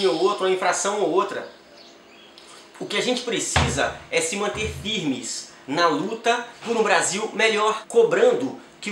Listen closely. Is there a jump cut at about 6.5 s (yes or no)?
yes